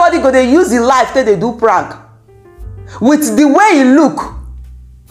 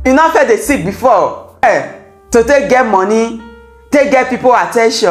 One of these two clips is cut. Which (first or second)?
second